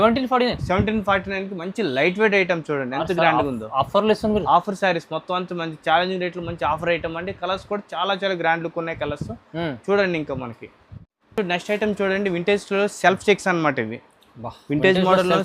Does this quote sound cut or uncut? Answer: uncut